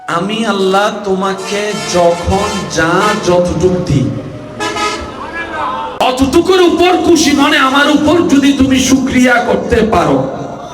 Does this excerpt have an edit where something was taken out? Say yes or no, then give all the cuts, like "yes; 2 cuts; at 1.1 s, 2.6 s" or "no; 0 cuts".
yes; 1 cut; at 6.0 s